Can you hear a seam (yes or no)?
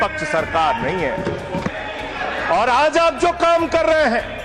yes